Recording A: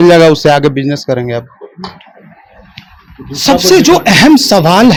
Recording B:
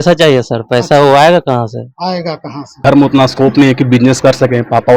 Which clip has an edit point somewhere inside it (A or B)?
B